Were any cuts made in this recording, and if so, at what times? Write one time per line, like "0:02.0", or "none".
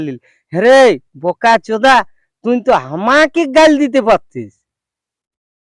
none